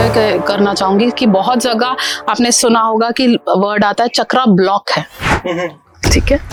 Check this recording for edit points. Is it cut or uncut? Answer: uncut